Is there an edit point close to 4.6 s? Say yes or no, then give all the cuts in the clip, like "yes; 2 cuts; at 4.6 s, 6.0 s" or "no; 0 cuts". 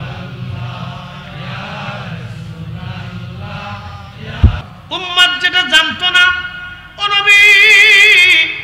yes; 1 cut; at 4.6 s